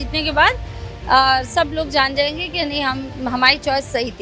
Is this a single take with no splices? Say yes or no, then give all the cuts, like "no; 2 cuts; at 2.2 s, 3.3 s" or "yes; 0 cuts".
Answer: yes; 0 cuts